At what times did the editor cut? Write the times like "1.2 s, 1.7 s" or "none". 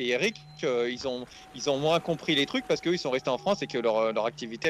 none